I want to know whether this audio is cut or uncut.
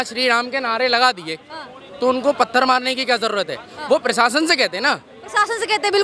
uncut